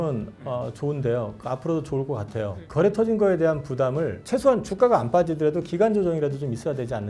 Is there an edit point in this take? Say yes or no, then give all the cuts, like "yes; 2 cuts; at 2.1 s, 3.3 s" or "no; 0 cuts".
yes; 2 cuts; at 2.5 s, 4.2 s